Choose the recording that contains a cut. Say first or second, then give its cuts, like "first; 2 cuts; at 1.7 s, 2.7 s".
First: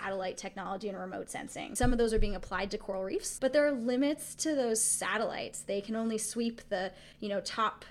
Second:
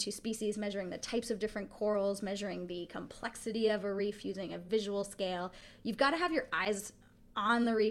first; 2 cuts; at 1.7 s, 3.3 s